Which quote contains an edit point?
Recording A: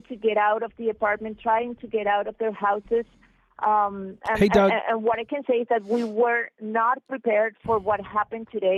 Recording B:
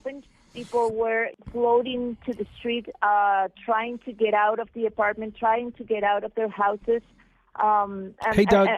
B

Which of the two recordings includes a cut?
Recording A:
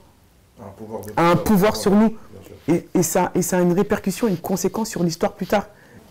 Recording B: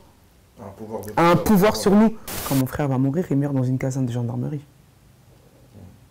B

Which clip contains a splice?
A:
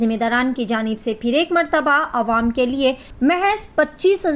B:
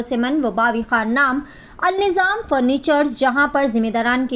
A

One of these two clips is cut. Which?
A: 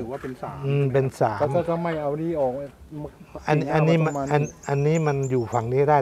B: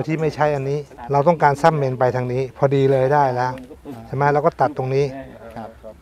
B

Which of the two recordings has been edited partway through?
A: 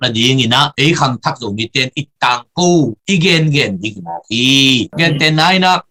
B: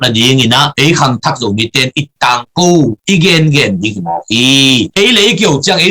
B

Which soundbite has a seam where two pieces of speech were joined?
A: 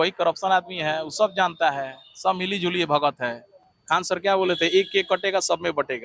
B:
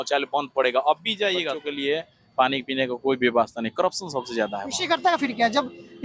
B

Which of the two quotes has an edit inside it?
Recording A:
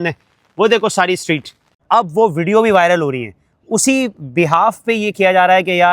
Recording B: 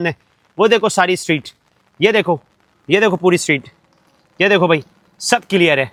A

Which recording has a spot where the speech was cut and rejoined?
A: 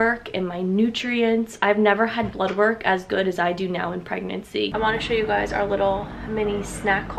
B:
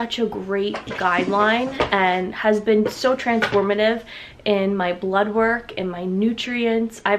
A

